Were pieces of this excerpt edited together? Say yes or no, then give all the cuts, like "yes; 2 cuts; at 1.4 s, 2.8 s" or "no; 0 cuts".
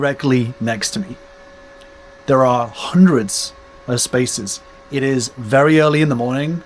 yes; 1 cut; at 2.1 s